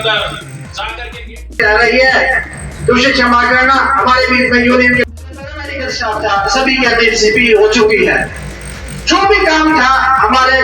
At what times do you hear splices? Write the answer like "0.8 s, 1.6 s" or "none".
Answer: 1.6 s, 5.1 s